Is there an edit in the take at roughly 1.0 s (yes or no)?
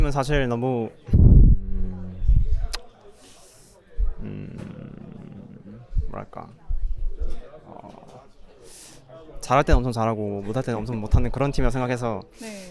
no